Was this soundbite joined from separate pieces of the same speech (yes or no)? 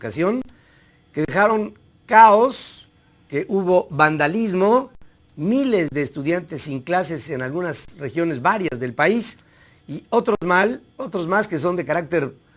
yes